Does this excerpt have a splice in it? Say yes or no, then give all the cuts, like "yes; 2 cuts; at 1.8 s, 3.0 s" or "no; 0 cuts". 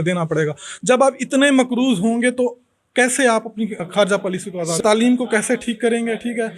yes; 2 cuts; at 3.8 s, 4.8 s